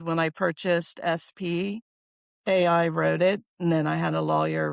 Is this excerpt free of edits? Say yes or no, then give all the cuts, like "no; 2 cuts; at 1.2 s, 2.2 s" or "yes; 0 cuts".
yes; 0 cuts